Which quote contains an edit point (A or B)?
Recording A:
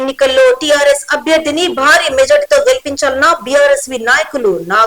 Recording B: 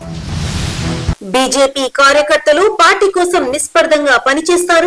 B